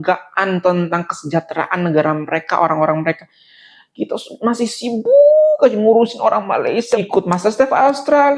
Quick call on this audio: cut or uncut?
cut